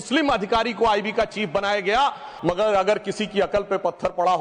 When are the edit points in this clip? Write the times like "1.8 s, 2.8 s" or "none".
2.3 s